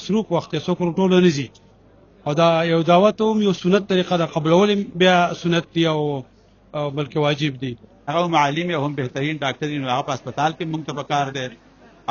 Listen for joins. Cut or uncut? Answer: cut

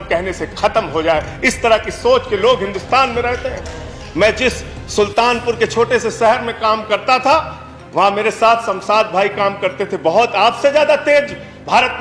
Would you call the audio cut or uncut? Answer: uncut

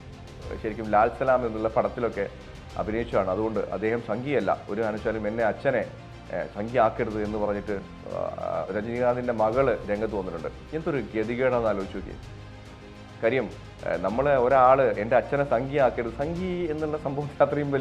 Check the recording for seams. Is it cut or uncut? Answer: uncut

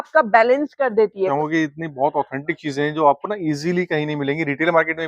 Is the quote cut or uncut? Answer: cut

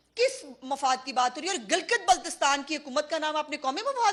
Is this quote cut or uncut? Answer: uncut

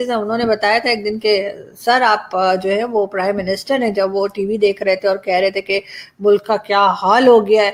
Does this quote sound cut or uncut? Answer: uncut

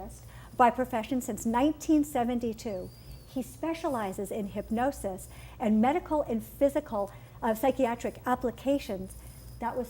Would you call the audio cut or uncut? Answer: cut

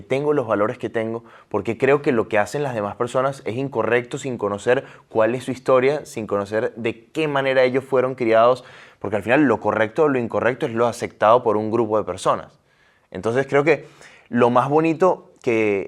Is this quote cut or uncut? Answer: uncut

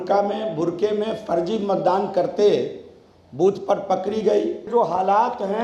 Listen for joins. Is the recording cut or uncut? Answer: cut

